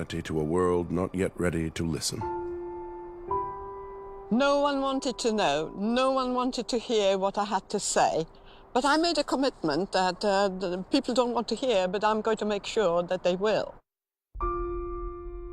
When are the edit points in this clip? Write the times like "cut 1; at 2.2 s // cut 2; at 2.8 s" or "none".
cut 1; at 1.7 s